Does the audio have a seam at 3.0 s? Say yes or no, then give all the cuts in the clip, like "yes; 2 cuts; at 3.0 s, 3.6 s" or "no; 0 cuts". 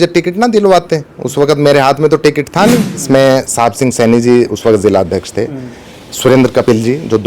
yes; 1 cut; at 3.0 s